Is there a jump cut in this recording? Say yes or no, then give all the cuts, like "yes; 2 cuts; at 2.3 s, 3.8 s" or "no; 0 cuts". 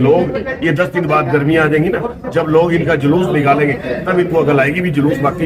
no; 0 cuts